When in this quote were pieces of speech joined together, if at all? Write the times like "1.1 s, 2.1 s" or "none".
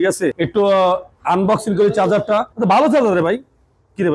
2.5 s